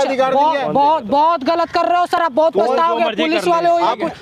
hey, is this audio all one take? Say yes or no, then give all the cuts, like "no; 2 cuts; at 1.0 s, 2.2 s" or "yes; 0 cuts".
yes; 0 cuts